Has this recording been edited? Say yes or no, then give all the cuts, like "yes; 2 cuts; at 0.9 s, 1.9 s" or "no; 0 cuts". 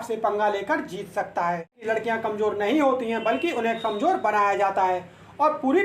yes; 1 cut; at 1.8 s